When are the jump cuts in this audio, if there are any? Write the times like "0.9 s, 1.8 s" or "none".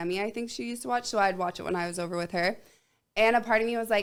none